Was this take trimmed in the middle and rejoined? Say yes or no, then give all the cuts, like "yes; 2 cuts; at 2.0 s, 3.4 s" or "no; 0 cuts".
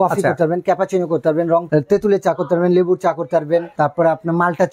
yes; 2 cuts; at 1.7 s, 3.7 s